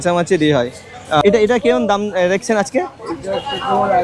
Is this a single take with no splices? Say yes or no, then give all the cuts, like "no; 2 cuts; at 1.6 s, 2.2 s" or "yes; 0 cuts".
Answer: no; 1 cut; at 1.2 s